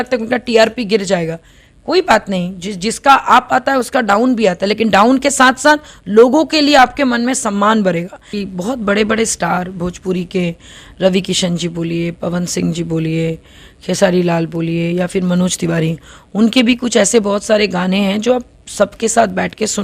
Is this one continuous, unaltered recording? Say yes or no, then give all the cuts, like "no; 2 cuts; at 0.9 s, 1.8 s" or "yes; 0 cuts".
no; 1 cut; at 8.3 s